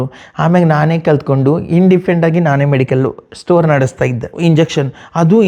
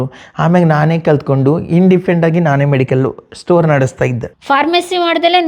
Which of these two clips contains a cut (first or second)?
first